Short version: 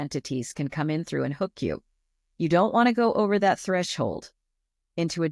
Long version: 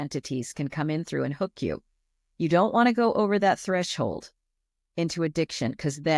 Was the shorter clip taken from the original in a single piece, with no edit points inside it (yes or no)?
yes